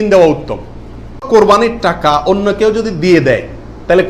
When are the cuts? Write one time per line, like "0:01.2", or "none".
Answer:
0:01.3